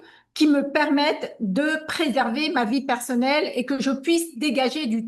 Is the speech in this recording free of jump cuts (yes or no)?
yes